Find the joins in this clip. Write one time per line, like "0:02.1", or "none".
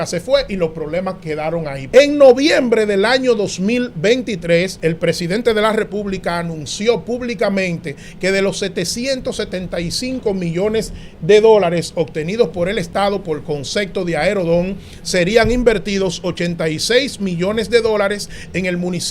0:01.8
0:04.7